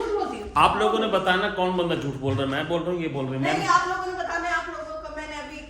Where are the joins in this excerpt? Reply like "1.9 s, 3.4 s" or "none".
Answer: none